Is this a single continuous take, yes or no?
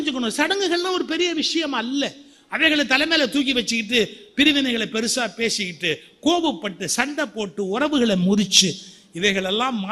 yes